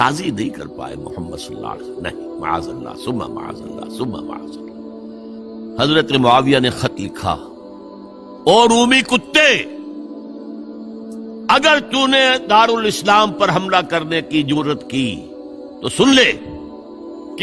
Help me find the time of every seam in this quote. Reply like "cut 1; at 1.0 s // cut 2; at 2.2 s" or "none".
cut 1; at 5.7 s